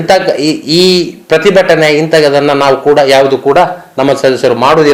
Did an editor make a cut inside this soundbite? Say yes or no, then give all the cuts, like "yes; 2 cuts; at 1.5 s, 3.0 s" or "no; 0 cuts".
no; 0 cuts